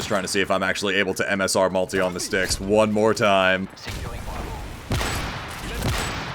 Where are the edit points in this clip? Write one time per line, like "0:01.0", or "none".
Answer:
0:03.8